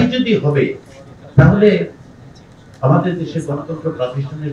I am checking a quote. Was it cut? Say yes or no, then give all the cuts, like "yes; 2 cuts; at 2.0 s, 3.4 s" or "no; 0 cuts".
no; 0 cuts